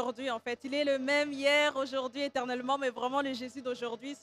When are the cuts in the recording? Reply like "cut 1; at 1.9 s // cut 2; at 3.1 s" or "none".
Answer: none